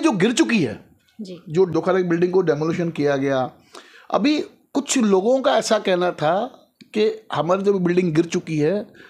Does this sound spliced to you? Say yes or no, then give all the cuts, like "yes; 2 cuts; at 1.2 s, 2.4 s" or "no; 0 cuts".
yes; 1 cut; at 1.7 s